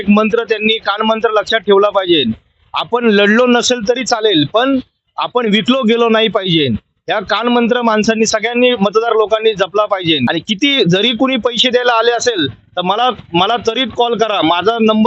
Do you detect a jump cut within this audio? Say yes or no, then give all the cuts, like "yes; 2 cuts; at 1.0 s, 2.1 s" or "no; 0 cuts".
yes; 1 cut; at 10.3 s